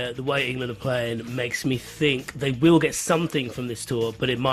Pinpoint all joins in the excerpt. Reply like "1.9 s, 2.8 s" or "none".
none